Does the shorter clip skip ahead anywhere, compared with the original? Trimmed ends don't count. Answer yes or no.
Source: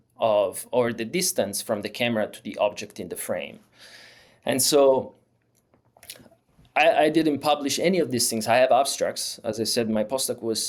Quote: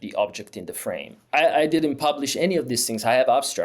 yes